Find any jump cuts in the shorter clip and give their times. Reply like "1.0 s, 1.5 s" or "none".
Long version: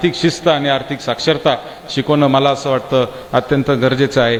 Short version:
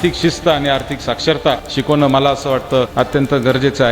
1.7 s, 2.9 s